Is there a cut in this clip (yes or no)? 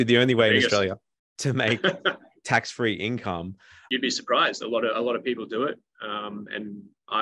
yes